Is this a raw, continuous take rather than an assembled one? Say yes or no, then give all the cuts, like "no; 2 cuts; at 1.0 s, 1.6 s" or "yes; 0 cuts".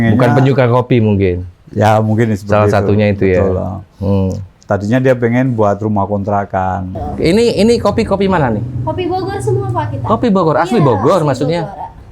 no; 1 cut; at 6.9 s